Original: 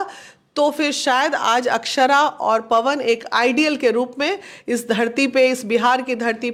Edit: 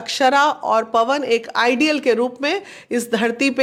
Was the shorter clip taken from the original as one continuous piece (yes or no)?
yes